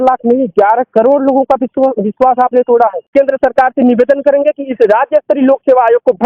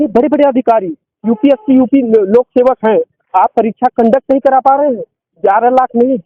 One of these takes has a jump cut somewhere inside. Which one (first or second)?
first